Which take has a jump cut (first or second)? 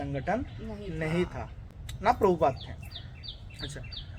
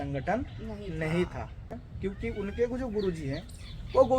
second